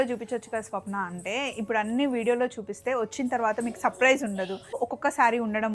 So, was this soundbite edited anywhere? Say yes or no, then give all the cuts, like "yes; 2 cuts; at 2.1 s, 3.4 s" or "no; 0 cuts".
yes; 1 cut; at 4.8 s